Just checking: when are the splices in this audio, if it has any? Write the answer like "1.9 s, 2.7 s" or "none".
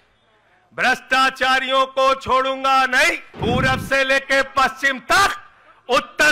3.3 s